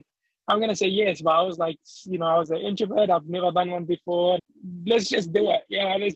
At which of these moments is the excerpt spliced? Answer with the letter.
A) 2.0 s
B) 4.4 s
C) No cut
B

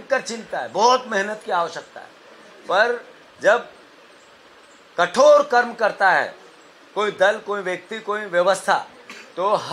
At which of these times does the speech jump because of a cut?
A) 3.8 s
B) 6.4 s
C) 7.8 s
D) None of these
D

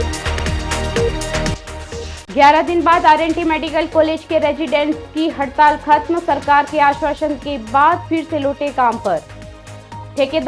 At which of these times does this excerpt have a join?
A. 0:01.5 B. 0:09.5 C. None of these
A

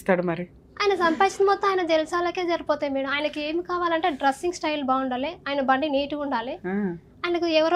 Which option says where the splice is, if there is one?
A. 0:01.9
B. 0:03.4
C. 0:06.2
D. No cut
D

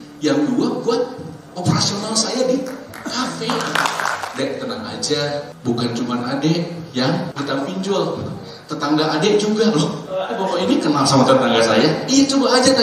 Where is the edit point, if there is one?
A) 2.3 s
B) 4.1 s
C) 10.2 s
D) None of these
B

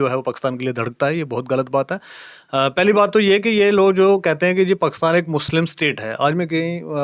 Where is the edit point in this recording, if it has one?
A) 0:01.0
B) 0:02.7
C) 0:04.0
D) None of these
D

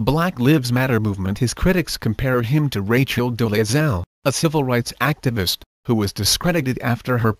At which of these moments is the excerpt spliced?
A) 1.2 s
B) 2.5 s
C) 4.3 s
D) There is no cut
D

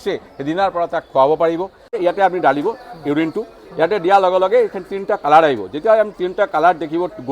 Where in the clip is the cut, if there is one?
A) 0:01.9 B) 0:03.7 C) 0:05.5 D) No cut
A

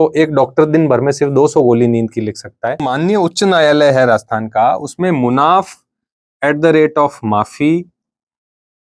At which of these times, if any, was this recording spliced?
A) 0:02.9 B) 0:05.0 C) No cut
A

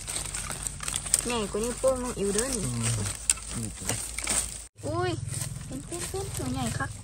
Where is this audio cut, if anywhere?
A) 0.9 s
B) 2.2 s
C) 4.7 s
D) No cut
C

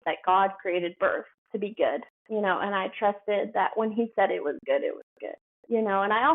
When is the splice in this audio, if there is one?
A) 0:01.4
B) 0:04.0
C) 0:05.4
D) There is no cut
A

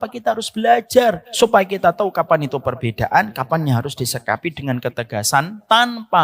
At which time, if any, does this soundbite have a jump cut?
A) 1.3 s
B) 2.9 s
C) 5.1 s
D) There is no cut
A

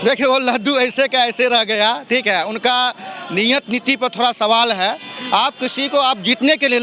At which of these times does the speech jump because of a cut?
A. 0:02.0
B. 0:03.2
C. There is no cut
C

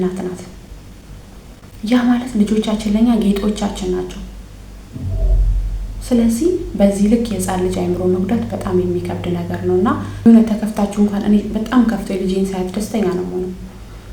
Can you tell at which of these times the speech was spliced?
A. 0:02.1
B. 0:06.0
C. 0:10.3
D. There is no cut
C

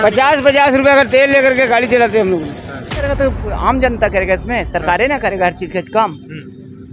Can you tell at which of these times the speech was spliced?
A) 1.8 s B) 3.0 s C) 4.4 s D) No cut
B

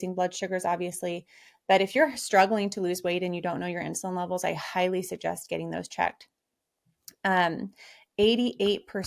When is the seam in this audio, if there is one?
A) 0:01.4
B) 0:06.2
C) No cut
C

